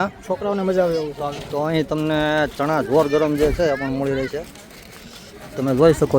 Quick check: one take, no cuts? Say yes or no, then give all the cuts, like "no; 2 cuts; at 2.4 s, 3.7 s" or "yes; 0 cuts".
no; 1 cut; at 1.1 s